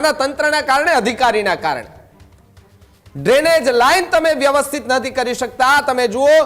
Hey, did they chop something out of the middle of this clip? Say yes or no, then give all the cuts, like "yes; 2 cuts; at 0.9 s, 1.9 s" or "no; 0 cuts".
no; 0 cuts